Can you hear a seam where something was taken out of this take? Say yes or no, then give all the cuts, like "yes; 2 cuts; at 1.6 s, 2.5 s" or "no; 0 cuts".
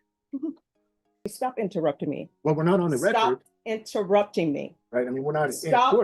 yes; 2 cuts; at 1.3 s, 4.7 s